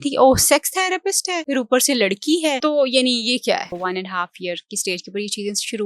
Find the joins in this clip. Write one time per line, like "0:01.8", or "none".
0:01.3
0:02.6
0:03.7